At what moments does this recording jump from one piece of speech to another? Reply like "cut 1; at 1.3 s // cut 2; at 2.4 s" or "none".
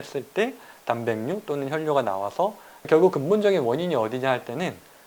cut 1; at 2.9 s